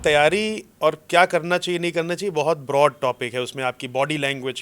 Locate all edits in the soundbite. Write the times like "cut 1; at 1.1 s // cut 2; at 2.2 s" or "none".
none